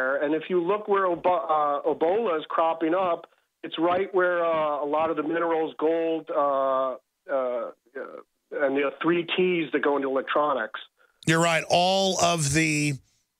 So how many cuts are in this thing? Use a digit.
1